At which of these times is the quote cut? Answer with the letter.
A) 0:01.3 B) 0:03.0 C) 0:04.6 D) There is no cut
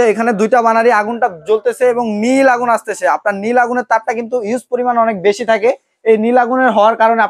D